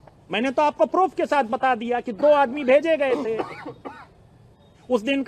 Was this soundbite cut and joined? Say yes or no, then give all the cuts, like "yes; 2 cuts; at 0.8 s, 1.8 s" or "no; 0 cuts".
no; 0 cuts